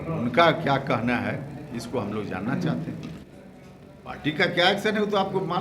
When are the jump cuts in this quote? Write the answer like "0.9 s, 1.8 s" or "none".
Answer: 3.2 s